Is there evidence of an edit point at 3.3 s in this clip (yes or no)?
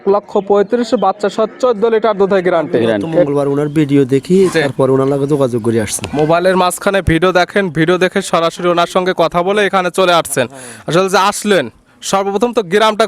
yes